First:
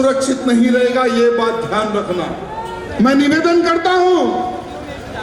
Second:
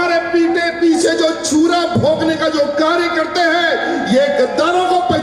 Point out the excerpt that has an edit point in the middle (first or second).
first